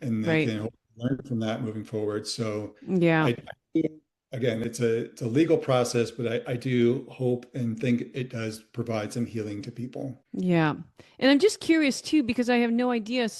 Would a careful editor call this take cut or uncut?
cut